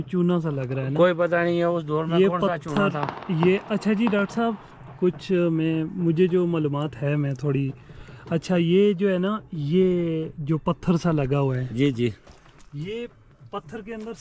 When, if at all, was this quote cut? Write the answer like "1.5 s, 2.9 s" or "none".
none